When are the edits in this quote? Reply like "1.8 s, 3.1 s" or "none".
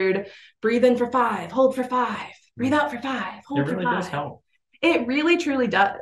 none